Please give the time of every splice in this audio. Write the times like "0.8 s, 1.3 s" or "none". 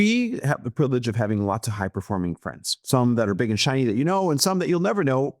none

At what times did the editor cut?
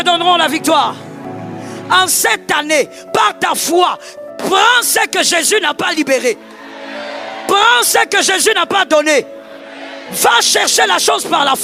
1.8 s

